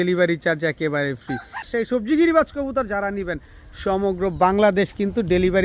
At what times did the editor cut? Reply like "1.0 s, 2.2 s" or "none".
1.7 s

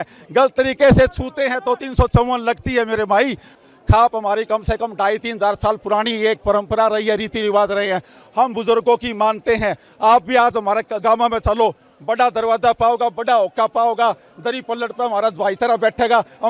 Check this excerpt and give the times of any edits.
3.6 s

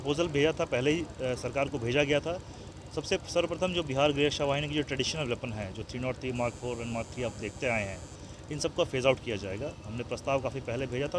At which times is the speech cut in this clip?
none

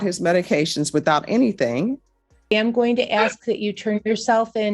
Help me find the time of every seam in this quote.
2.5 s

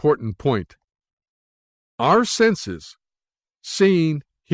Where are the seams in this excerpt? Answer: none

